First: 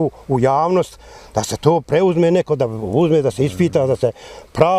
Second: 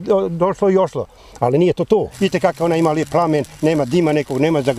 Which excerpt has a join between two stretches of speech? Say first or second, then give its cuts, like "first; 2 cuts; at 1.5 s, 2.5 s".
second; 1 cut; at 2.1 s